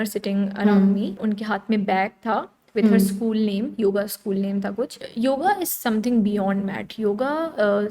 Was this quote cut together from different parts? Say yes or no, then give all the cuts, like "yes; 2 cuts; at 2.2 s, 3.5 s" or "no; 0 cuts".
yes; 1 cut; at 5.0 s